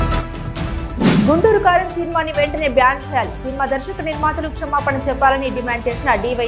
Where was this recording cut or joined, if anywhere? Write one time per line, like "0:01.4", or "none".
0:01.0